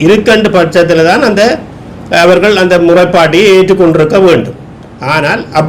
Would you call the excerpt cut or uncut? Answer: uncut